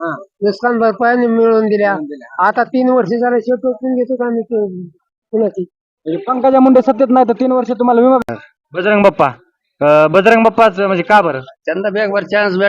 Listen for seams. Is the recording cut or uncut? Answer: cut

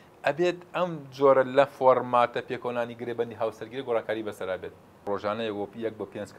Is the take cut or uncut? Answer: cut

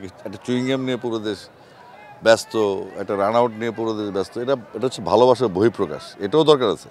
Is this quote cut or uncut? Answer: uncut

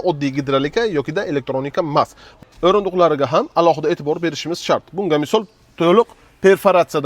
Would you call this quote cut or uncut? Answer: cut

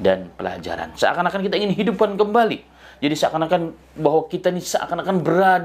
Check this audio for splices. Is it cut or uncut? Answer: uncut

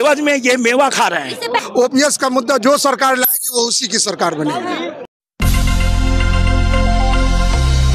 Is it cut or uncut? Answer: cut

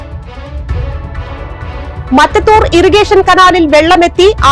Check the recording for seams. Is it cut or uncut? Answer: cut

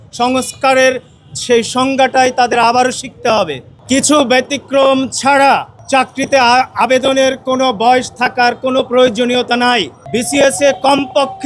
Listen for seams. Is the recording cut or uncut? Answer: cut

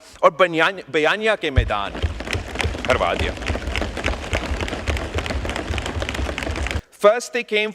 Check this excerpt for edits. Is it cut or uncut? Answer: cut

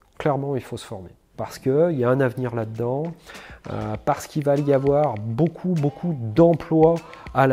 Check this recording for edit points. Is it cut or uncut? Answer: uncut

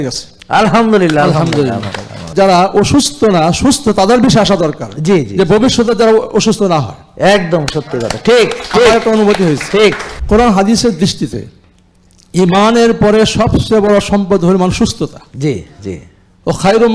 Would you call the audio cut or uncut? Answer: cut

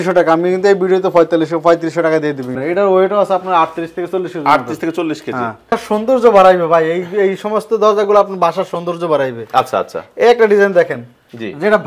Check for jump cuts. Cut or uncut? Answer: cut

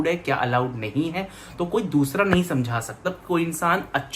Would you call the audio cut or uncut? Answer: cut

